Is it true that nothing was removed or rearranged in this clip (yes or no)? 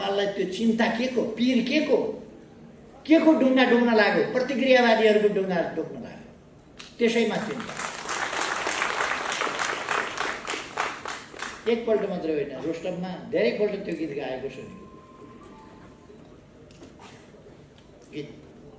yes